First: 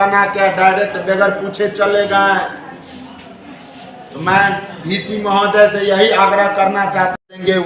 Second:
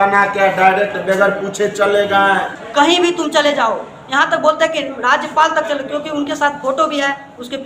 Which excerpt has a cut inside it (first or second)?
second